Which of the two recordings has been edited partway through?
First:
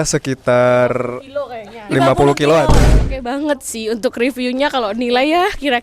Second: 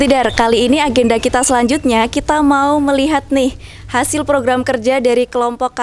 first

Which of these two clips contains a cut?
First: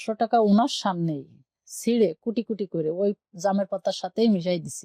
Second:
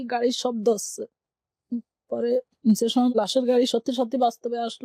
second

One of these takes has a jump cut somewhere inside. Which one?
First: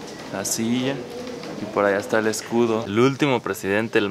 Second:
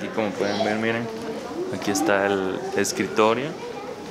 first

